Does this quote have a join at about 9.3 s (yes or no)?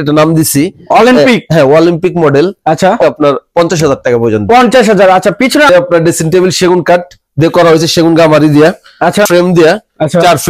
yes